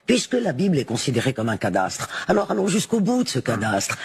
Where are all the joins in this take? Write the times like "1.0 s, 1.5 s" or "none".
none